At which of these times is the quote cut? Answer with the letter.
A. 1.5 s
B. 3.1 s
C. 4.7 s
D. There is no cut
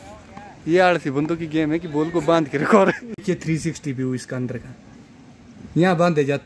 B